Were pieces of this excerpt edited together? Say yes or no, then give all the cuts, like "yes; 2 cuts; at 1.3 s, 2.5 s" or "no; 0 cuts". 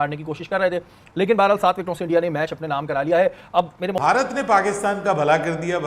yes; 1 cut; at 3.9 s